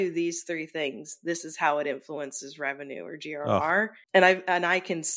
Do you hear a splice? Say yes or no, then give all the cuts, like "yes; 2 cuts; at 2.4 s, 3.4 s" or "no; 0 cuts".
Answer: yes; 1 cut; at 4.0 s